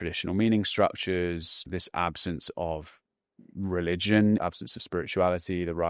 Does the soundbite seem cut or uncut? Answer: cut